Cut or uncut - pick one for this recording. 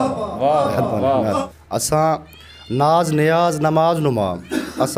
cut